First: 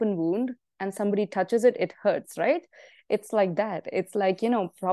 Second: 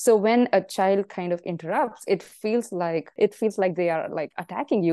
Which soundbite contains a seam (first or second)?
second